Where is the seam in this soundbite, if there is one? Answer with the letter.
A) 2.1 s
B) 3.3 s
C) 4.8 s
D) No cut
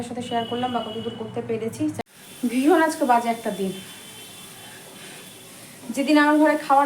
A